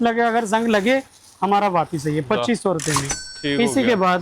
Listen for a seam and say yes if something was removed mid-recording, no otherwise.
no